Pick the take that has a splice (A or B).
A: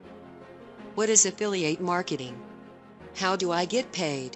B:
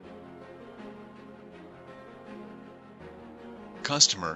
A